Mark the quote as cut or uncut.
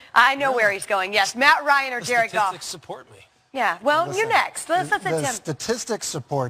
cut